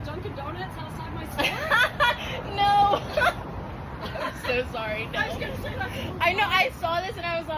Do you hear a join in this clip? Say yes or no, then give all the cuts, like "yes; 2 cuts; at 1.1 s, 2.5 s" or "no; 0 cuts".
no; 0 cuts